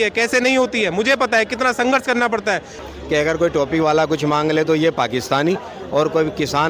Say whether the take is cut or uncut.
cut